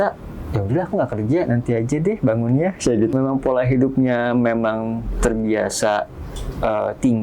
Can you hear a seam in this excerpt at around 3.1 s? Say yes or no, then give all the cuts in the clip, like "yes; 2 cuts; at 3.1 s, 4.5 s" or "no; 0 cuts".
yes; 1 cut; at 3.1 s